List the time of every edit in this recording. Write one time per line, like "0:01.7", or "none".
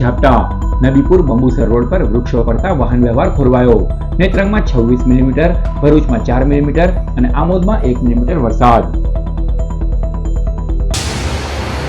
0:10.9